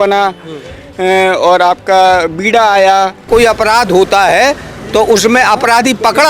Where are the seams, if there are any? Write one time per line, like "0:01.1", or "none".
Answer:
0:03.3